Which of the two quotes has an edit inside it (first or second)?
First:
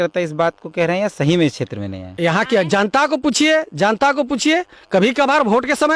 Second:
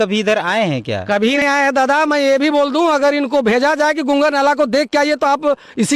second